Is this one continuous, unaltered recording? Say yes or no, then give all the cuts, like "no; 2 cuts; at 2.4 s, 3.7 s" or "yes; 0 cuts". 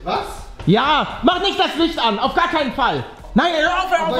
no; 1 cut; at 3.2 s